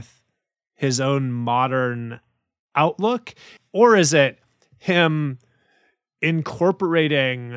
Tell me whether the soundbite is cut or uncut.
cut